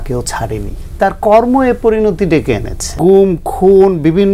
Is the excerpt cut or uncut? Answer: cut